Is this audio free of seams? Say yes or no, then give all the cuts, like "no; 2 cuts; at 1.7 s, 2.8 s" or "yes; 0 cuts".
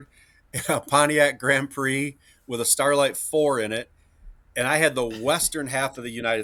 yes; 0 cuts